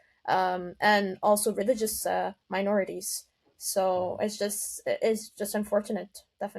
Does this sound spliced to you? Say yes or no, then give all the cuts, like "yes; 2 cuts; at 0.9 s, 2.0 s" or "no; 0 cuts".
no; 0 cuts